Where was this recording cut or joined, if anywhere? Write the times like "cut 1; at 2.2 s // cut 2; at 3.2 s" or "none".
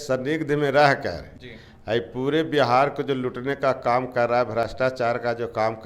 none